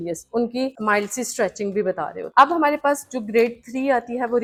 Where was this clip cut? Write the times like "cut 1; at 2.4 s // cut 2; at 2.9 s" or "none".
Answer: none